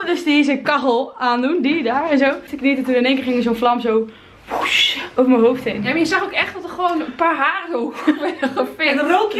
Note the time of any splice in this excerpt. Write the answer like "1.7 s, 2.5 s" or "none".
2.5 s